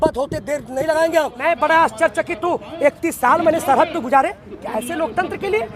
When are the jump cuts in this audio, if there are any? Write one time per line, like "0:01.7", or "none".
0:01.3